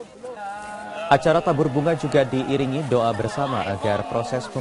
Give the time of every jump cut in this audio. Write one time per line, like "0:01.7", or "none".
0:02.1